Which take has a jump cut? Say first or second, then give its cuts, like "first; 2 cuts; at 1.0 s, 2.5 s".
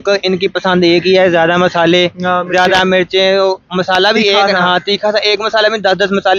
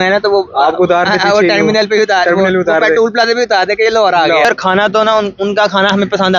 second; 1 cut; at 4.4 s